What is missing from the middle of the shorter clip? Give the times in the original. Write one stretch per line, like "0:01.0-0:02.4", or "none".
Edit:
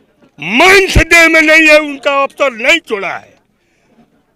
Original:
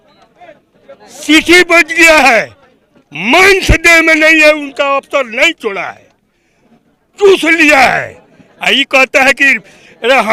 none